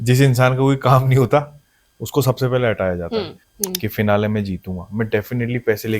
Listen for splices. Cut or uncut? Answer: cut